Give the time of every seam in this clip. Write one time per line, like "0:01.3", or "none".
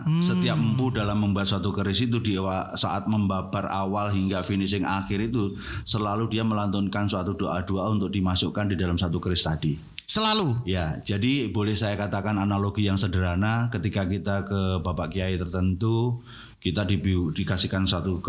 none